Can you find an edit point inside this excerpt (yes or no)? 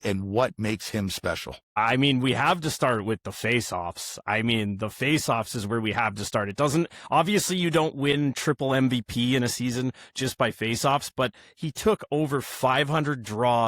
yes